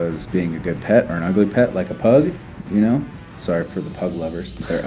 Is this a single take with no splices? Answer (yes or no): yes